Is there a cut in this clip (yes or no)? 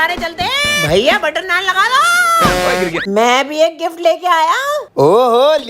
yes